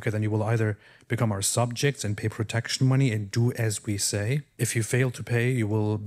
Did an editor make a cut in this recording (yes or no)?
yes